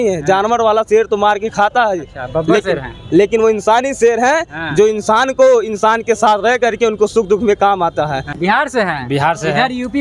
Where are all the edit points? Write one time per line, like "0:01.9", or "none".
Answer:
0:08.3